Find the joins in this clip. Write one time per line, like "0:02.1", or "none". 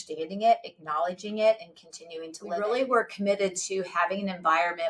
0:02.5